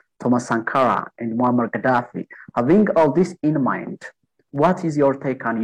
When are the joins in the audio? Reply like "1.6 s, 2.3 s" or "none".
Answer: none